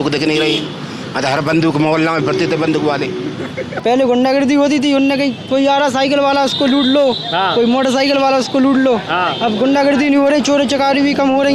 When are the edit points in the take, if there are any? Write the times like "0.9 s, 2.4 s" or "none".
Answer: 3.7 s